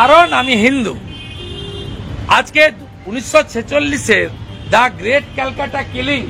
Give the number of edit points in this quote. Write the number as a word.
zero